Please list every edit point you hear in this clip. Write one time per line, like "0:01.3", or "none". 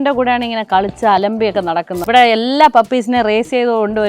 0:01.9

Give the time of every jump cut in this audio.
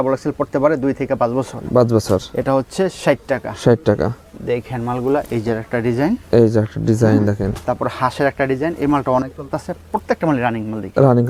none

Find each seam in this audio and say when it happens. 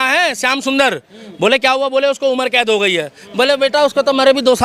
none

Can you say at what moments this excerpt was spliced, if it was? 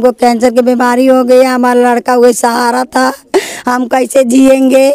none

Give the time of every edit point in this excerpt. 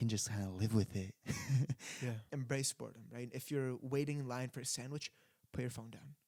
0:02.2

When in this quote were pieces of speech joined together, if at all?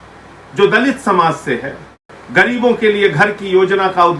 0:02.1

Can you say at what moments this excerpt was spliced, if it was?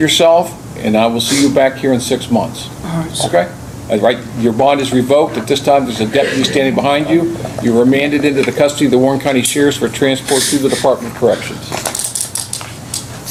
none

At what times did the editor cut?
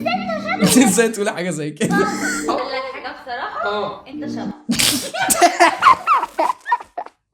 none

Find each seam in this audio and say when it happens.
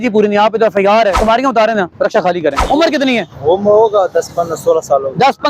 0:01.2
0:02.6

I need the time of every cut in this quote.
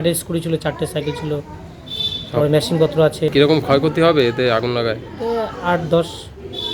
0:03.3

